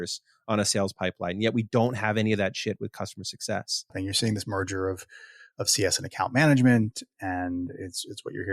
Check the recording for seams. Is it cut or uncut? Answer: cut